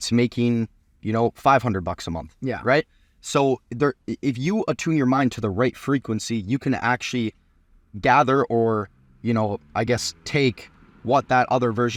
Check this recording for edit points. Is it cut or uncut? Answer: uncut